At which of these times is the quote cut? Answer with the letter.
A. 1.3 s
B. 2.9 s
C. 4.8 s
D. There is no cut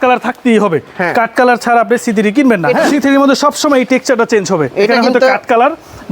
B